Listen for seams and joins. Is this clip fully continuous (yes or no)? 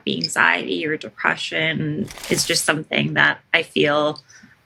yes